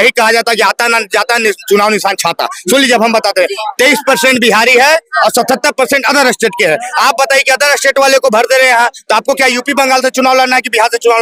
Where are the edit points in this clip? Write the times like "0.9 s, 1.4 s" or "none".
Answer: none